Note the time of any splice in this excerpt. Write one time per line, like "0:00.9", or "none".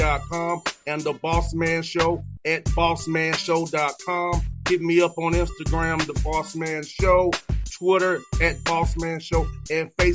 none